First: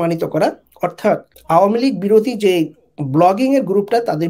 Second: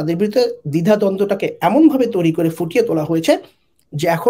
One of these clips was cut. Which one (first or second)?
first